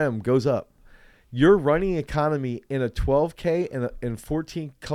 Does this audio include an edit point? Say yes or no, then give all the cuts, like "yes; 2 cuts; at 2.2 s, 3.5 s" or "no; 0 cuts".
no; 0 cuts